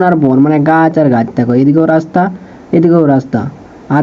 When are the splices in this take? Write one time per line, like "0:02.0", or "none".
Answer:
none